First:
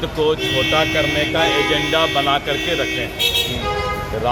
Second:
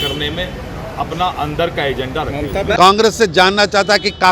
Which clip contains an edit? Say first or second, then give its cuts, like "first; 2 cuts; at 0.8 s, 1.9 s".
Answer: second; 1 cut; at 2.8 s